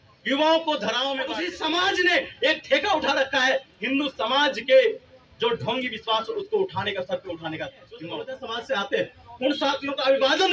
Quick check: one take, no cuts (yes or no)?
no